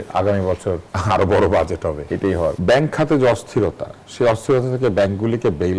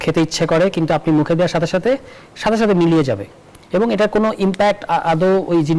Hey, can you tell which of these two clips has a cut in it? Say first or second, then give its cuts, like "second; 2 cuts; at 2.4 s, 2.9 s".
first; 2 cuts; at 0.9 s, 2.5 s